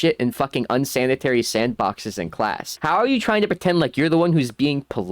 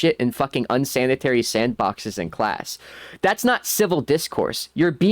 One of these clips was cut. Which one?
first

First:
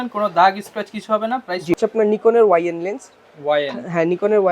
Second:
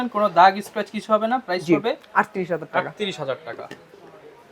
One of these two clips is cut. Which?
first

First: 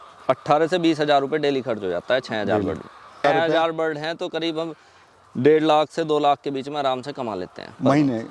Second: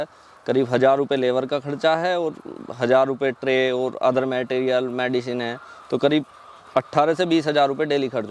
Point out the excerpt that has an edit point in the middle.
first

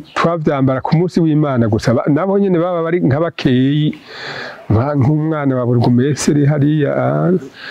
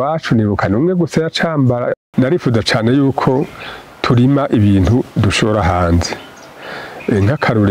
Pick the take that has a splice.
second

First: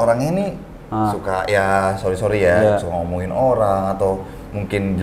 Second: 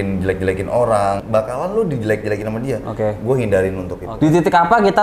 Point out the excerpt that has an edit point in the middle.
second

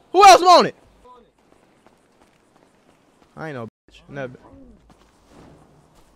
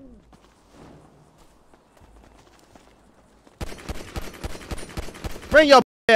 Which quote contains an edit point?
first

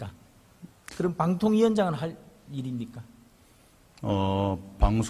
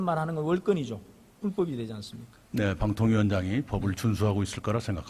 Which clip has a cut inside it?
second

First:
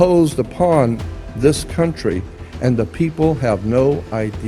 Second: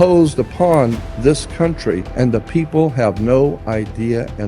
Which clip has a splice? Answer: second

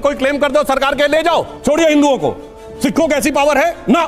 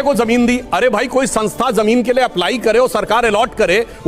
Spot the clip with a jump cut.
first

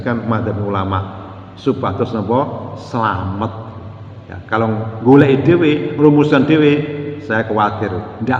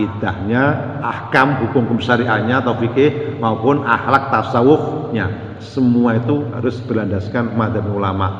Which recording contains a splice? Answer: second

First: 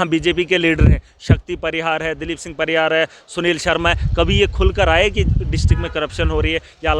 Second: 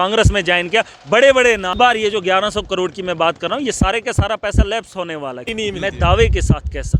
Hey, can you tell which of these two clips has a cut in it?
second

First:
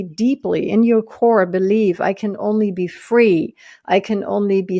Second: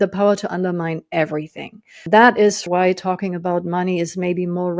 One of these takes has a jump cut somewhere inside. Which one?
second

